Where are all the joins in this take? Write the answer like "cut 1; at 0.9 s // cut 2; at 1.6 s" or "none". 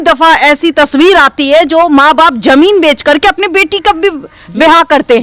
none